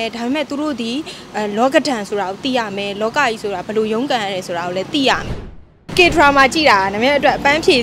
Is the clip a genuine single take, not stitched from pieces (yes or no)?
no